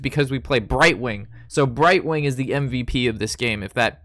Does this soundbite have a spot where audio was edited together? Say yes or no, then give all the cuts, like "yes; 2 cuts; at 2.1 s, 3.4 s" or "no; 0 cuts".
no; 0 cuts